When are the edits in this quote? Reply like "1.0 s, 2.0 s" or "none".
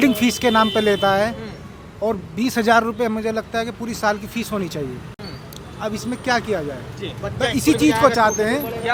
none